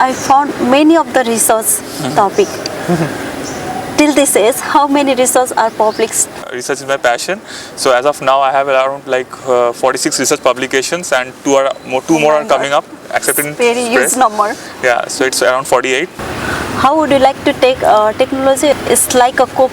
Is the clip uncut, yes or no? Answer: no